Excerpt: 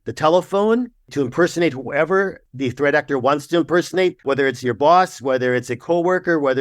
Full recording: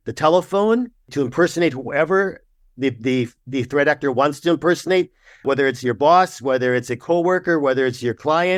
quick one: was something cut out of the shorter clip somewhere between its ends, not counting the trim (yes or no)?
yes